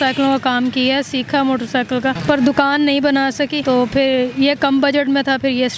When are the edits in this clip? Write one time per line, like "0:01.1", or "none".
0:02.2
0:03.6